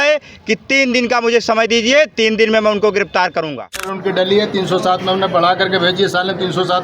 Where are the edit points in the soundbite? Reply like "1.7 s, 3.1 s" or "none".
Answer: 3.9 s